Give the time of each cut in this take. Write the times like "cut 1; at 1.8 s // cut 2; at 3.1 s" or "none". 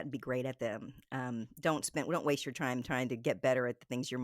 none